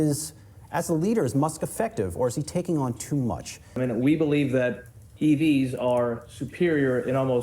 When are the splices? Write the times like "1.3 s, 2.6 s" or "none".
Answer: 3.8 s